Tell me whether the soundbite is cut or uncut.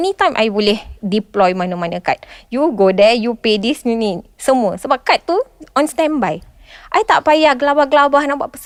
uncut